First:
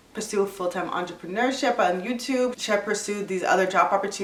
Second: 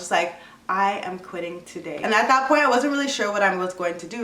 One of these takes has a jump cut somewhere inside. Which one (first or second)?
second